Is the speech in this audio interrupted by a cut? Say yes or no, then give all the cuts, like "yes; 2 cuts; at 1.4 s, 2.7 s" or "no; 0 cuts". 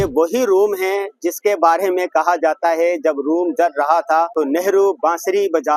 yes; 1 cut; at 4.3 s